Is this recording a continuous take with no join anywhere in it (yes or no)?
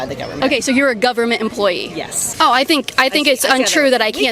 no